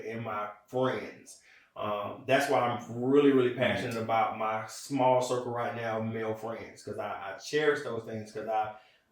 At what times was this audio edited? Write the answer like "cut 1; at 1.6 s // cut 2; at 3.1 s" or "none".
none